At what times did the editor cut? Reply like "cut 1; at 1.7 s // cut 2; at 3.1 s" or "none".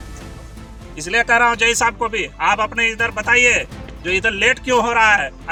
none